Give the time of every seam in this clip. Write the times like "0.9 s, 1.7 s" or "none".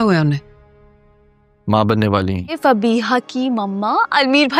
2.6 s